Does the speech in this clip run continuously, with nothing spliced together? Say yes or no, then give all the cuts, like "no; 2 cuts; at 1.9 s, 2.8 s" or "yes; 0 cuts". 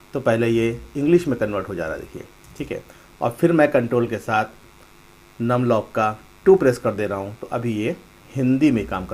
yes; 0 cuts